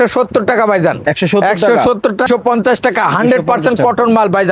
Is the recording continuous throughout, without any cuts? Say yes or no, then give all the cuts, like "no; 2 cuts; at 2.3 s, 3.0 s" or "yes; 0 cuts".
no; 1 cut; at 2.3 s